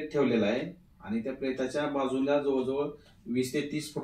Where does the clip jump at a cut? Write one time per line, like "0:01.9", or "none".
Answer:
none